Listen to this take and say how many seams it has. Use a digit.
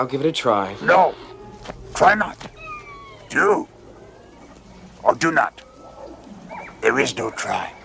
0